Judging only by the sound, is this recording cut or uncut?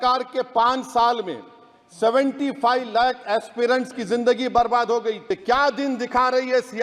cut